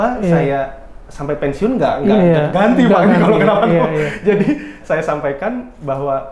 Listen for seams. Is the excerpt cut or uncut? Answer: uncut